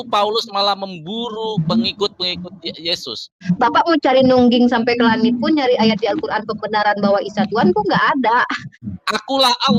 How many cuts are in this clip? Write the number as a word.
two